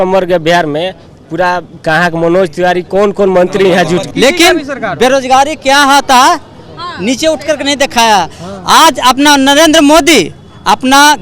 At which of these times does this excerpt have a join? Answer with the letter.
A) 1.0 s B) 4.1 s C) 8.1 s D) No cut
B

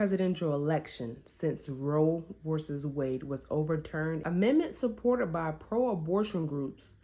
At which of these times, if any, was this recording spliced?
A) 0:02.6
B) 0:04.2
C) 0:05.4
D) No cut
B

